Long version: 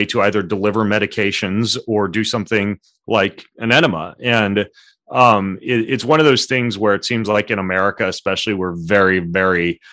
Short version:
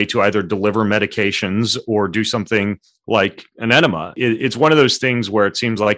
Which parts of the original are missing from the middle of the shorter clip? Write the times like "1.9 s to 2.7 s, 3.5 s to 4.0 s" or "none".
4.1 s to 5.6 s